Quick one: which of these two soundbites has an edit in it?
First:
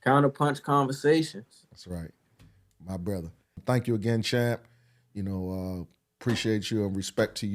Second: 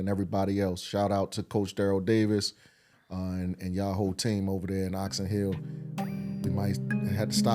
first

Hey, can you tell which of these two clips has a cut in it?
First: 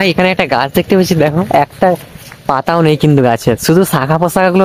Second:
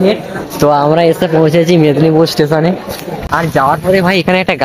second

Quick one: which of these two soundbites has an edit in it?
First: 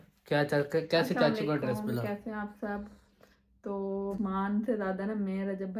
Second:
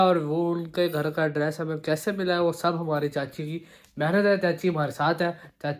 first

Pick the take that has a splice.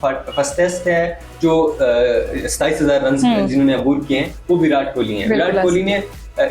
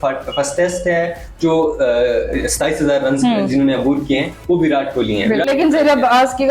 second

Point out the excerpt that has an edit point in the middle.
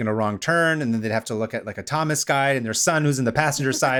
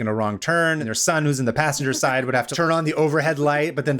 second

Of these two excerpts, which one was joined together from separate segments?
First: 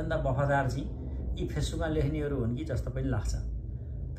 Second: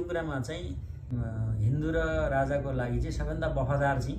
second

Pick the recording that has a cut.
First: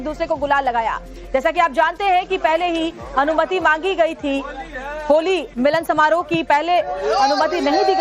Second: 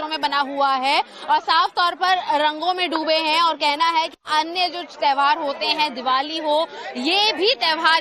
first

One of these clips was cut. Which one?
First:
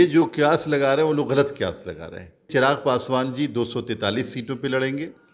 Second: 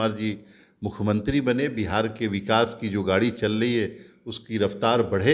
first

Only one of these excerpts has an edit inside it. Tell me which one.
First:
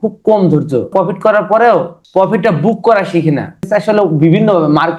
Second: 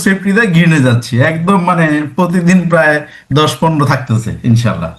first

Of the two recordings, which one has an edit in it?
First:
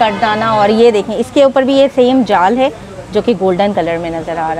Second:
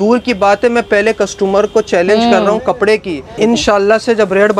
second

